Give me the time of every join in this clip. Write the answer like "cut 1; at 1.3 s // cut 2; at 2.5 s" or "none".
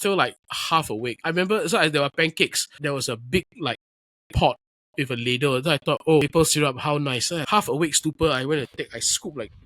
cut 1; at 1.0 s // cut 2; at 2.8 s // cut 3; at 6.2 s // cut 4; at 7.4 s